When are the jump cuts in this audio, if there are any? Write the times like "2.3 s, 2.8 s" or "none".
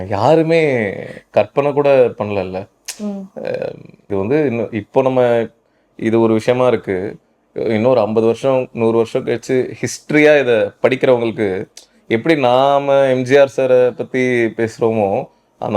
4.1 s